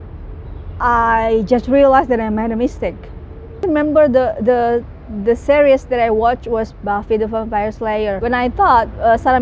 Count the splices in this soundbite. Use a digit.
2